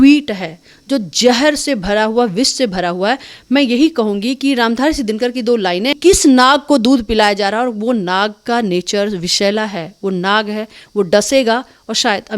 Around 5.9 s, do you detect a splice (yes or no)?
yes